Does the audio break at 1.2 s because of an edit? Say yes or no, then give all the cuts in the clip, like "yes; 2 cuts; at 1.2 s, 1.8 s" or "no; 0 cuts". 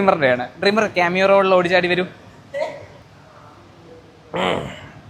no; 1 cut; at 2.9 s